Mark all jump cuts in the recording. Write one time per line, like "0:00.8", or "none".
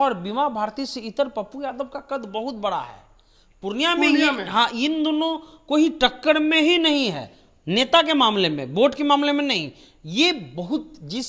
none

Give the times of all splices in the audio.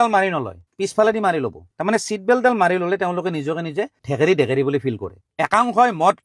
0:05.2

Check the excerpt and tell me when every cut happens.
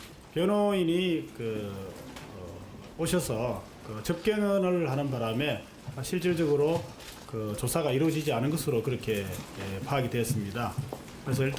0:02.2

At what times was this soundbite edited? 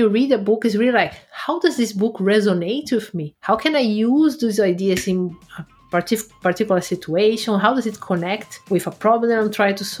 none

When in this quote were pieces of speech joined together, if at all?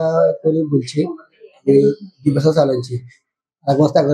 none

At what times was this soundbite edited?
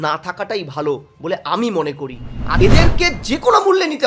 0:02.6

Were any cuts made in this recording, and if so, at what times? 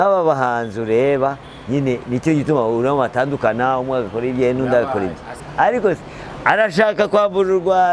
0:05.4

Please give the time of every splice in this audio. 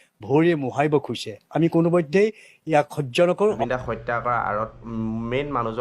0:03.6

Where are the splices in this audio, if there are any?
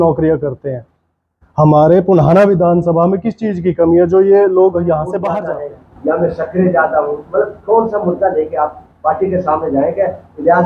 0:05.4

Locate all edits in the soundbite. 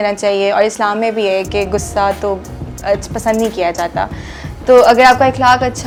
none

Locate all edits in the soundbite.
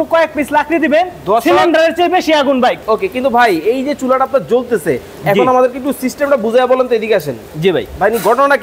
0:02.8

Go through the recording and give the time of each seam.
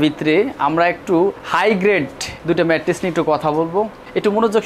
none

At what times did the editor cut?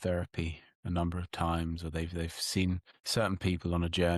0:02.9

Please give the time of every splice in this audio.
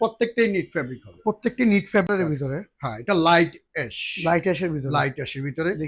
0:02.1

